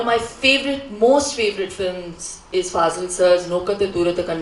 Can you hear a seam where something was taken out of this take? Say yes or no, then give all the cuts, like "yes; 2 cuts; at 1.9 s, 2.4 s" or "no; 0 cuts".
no; 0 cuts